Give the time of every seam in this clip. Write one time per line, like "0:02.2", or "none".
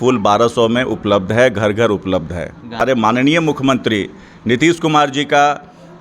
0:02.8